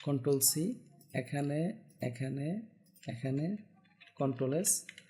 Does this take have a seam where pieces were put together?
no; 0 cuts

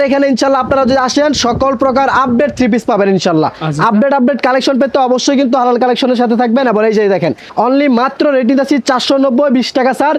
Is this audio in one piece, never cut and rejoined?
yes; 0 cuts

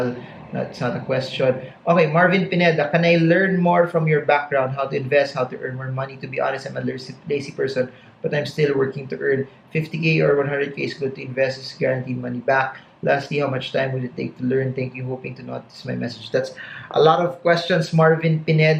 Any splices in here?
no; 0 cuts

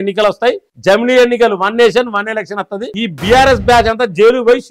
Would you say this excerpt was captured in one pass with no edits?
no; 1 cut; at 2.9 s

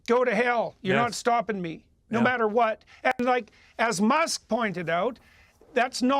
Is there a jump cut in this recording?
yes; 1 cut; at 1.0 s

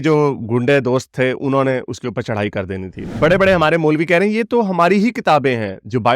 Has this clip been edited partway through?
yes; 1 cut; at 3.1 s

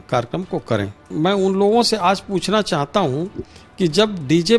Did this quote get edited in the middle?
yes; 1 cut; at 1.1 s

